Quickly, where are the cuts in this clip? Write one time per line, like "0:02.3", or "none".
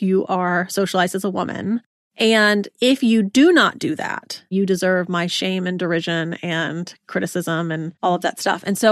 0:02.4
0:04.5
0:07.9

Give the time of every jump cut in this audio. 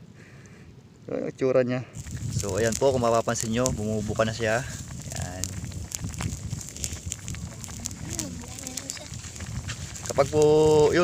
0:02.0

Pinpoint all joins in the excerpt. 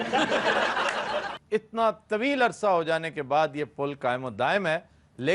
0:01.3

